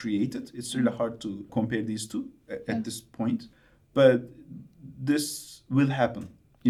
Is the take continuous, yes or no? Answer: yes